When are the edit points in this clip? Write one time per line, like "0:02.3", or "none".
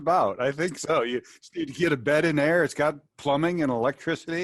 none